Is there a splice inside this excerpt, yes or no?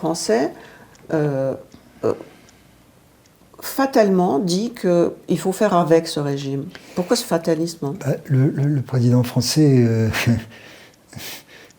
no